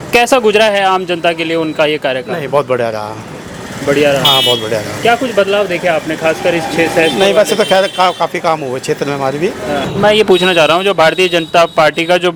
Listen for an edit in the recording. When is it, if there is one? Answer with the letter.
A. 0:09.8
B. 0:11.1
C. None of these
C